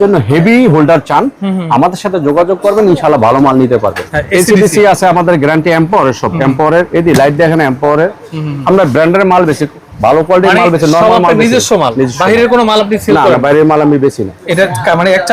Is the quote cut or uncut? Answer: cut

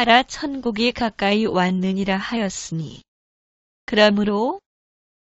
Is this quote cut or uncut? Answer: cut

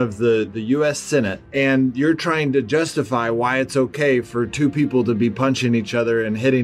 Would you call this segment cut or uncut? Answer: cut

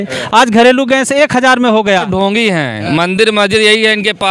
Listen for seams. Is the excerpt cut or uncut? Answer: cut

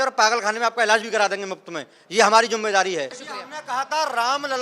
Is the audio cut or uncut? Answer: cut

